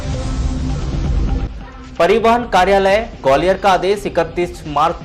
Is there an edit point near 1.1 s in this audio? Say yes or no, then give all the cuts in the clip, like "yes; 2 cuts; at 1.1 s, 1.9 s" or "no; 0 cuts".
yes; 1 cut; at 1.1 s